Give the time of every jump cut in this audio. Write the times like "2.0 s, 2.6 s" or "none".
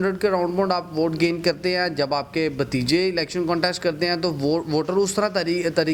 none